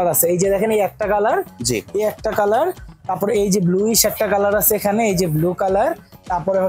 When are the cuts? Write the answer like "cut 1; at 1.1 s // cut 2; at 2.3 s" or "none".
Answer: none